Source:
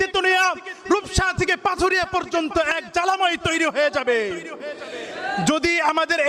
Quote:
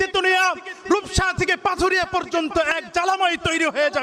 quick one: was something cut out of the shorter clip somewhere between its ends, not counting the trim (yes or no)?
no